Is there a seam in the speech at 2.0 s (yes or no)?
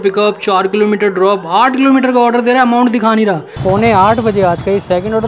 no